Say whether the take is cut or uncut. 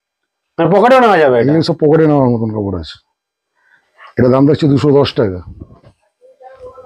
uncut